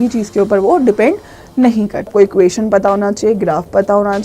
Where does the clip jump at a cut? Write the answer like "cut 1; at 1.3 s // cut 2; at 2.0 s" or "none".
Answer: cut 1; at 2.1 s